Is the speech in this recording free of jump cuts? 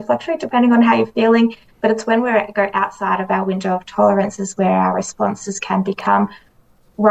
yes; 0 cuts

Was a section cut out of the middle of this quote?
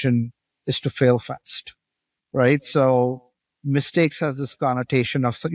no; 0 cuts

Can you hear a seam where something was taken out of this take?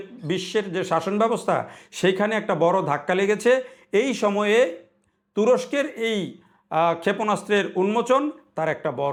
no; 0 cuts

